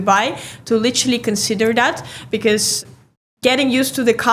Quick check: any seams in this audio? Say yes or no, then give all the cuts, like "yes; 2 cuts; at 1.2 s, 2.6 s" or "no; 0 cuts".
yes; 1 cut; at 2.7 s